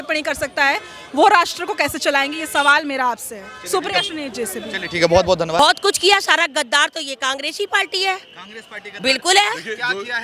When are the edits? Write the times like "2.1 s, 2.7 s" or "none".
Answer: none